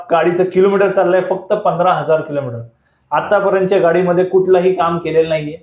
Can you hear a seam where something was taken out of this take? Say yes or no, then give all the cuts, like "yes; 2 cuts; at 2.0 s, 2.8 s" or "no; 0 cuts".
no; 0 cuts